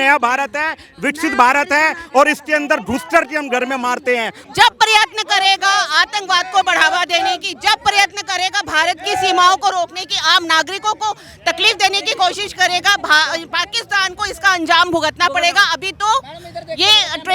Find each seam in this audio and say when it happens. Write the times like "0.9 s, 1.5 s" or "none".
4.4 s